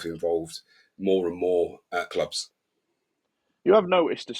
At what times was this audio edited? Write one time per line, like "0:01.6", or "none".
0:02.1